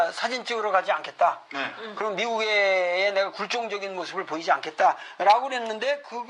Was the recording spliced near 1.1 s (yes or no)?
no